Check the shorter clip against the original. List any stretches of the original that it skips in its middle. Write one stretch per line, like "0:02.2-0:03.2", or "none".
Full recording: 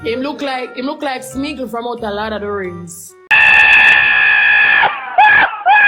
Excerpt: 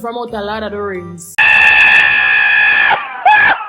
0:02.9-0:03.1